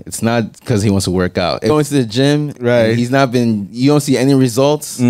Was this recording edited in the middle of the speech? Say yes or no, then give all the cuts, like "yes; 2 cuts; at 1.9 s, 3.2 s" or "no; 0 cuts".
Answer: yes; 1 cut; at 1.7 s